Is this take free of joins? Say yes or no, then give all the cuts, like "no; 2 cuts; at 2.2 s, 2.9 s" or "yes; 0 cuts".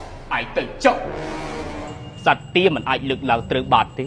no; 1 cut; at 1.8 s